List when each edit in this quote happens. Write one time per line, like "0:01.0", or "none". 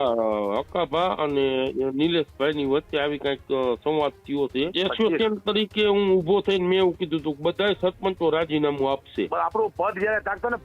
0:04.7
0:09.3